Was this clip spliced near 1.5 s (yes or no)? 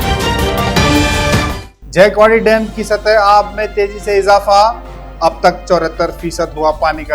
no